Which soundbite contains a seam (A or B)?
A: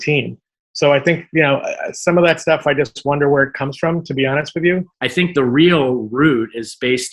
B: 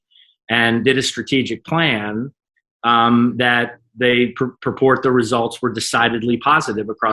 A